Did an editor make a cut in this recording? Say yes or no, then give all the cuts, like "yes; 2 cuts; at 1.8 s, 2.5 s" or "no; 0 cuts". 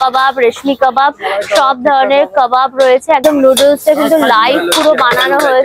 yes; 1 cut; at 3.4 s